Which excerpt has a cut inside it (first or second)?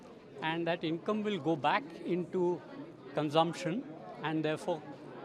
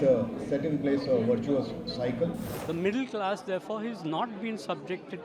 second